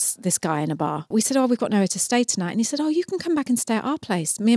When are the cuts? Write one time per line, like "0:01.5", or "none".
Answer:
0:01.1

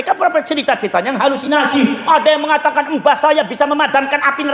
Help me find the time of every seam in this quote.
none

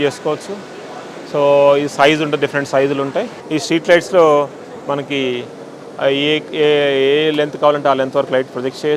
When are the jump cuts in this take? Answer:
0:03.4

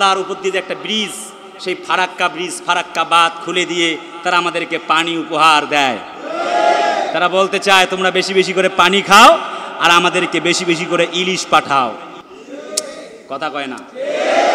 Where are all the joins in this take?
none

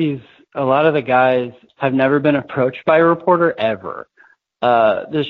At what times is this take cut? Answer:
0:01.6

